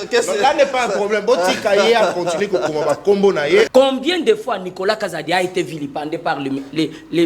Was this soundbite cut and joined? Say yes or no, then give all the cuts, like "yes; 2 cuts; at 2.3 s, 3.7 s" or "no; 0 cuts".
yes; 1 cut; at 3.7 s